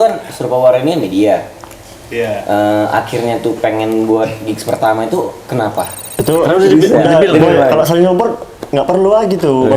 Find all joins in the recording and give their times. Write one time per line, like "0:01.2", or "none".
0:06.0